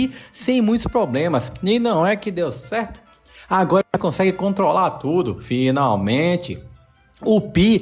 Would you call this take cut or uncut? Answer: uncut